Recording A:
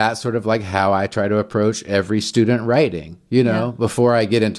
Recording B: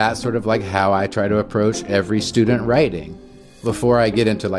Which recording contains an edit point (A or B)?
B